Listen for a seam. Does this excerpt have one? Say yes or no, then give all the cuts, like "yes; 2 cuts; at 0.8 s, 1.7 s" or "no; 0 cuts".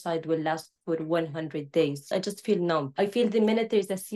yes; 2 cuts; at 2.1 s, 2.9 s